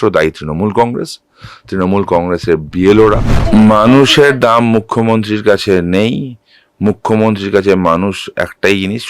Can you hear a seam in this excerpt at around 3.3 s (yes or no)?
yes